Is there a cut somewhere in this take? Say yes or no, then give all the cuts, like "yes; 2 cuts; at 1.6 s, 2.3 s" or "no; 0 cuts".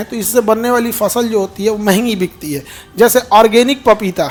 no; 0 cuts